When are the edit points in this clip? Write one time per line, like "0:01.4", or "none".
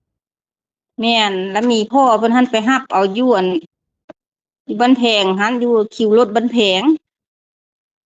none